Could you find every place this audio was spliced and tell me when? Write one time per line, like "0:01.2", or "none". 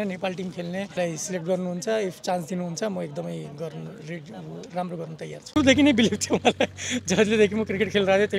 0:00.9
0:05.5